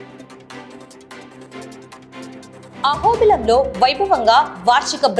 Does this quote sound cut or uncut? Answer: cut